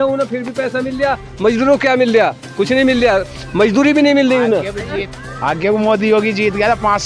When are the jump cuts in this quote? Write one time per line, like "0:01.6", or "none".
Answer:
0:05.1